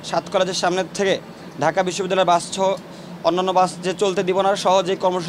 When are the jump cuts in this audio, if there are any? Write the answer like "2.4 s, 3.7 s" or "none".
none